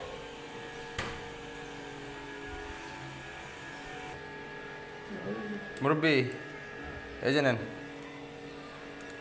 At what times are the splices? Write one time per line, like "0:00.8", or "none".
none